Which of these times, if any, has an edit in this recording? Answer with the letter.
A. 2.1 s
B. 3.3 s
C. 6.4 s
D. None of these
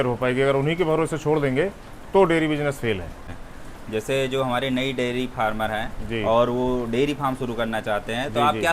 B